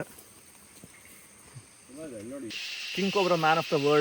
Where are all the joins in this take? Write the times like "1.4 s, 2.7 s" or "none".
2.5 s